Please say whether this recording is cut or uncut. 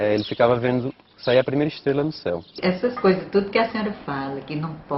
cut